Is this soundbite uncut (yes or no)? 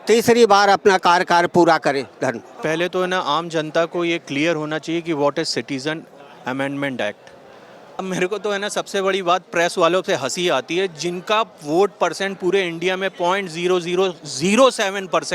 no